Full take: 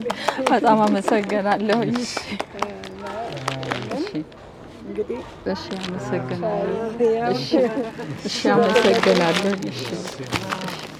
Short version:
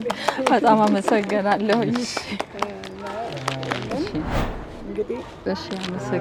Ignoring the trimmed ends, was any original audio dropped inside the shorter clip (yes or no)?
no